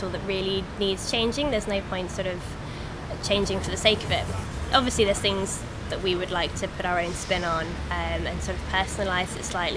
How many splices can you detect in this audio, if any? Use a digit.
1